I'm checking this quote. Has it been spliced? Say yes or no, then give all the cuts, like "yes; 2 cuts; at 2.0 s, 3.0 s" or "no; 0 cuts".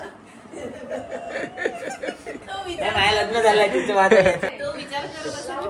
yes; 2 cuts; at 2.5 s, 4.5 s